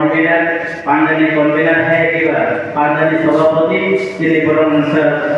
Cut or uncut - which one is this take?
uncut